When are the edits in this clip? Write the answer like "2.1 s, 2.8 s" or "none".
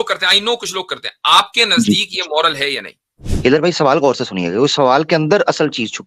3.3 s